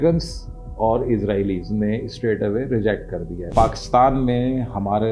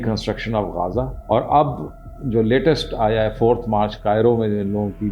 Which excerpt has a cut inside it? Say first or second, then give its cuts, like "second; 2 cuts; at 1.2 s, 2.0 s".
first; 1 cut; at 3.4 s